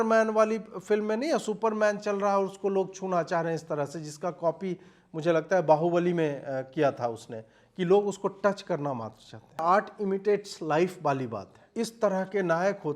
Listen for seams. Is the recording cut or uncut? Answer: cut